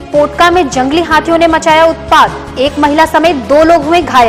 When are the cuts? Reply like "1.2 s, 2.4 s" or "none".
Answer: none